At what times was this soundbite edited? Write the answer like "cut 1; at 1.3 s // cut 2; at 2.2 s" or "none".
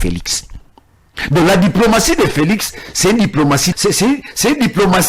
cut 1; at 3.7 s